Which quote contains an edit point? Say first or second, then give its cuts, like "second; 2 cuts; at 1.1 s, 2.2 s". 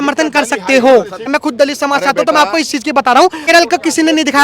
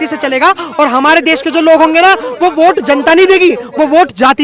first; 2 cuts; at 1.3 s, 3.5 s